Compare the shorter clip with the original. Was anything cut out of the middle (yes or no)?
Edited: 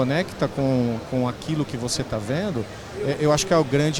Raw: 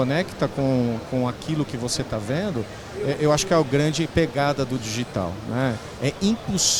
no